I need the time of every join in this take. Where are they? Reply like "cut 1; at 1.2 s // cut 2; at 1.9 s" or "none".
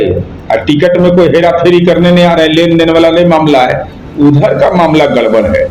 none